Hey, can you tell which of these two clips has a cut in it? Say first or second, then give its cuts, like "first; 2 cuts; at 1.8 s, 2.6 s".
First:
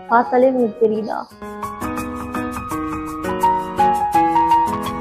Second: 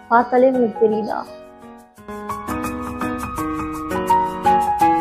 first; 1 cut; at 1.3 s